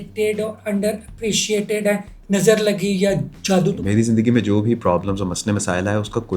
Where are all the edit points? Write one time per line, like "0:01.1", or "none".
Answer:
0:02.1
0:03.7